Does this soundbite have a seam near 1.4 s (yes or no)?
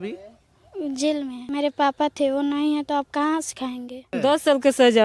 yes